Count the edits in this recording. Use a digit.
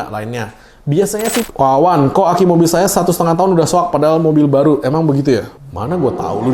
1